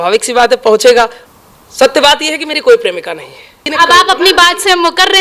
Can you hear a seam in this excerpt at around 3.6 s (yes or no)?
yes